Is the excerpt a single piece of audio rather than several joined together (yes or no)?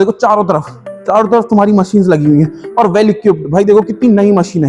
yes